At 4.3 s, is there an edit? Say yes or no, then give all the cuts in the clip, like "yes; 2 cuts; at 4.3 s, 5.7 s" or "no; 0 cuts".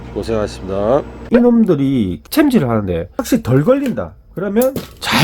no; 3 cuts; at 1.2 s, 2.2 s, 3.1 s